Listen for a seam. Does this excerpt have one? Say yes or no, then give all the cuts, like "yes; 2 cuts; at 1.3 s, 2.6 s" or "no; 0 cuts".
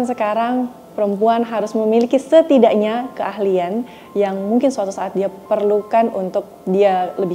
no; 0 cuts